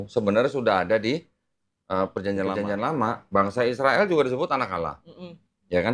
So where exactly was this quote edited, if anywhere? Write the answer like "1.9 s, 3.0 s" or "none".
2.5 s

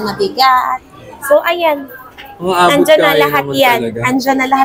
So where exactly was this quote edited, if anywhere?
none

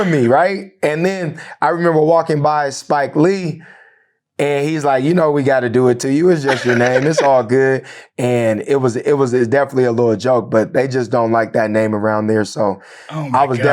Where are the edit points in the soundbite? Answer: 8.0 s

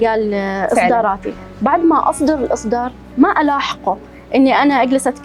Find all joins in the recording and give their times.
none

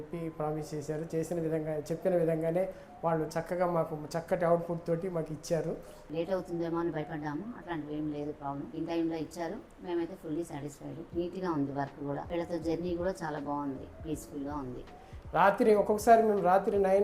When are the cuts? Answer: 6.0 s, 14.8 s

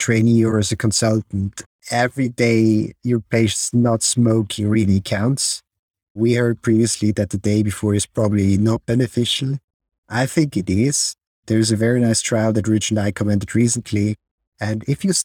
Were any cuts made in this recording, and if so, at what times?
none

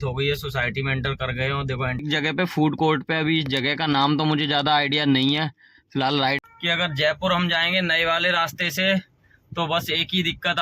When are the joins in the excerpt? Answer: 2.0 s, 6.4 s

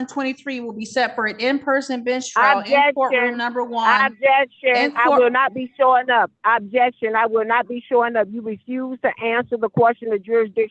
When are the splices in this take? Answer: none

